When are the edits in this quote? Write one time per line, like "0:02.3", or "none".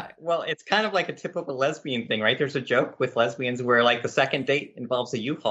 none